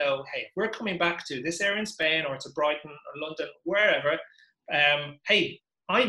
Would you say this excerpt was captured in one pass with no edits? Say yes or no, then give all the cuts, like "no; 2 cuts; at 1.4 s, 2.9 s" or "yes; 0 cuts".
yes; 0 cuts